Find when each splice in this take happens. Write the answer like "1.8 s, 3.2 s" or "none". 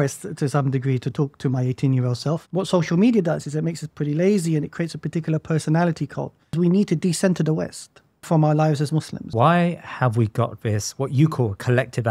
2.5 s, 6.5 s, 8.2 s, 9.3 s